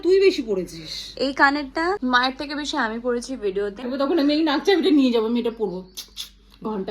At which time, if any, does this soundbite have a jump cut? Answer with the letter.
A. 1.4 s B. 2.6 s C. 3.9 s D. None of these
C